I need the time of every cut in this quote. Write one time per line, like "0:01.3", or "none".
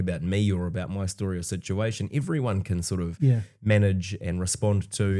none